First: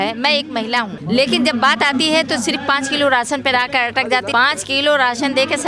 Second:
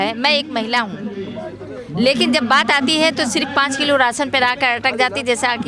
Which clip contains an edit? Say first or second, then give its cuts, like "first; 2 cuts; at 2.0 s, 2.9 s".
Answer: first; 2 cuts; at 1.0 s, 4.3 s